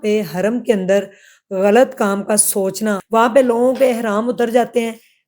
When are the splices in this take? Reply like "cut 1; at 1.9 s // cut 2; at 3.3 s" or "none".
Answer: cut 1; at 3.0 s

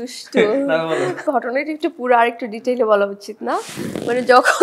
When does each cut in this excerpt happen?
cut 1; at 1.2 s

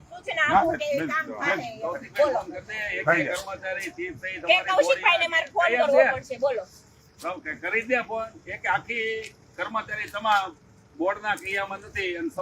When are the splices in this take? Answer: none

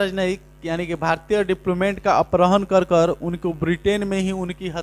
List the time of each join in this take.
none

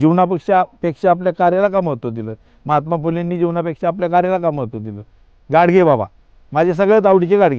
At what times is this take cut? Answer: none

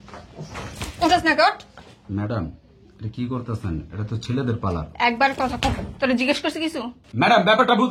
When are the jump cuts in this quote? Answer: cut 1; at 7.0 s

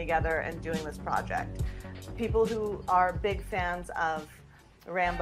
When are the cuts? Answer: none

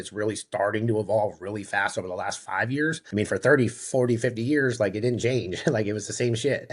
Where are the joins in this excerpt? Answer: cut 1; at 3.0 s

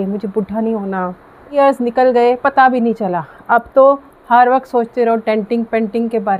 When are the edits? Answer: cut 1; at 1.5 s

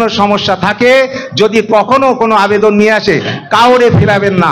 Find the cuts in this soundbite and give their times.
none

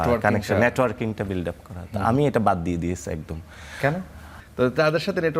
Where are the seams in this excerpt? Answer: cut 1; at 4.4 s

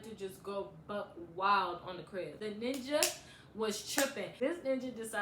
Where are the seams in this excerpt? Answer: cut 1; at 2.3 s // cut 2; at 4.3 s

